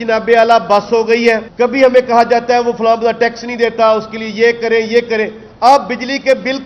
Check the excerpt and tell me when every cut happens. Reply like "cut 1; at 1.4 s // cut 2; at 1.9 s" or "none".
cut 1; at 1.5 s